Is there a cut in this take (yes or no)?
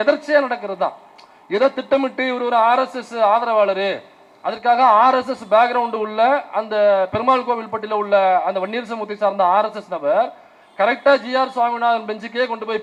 no